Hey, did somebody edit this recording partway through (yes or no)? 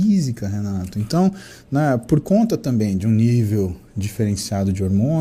no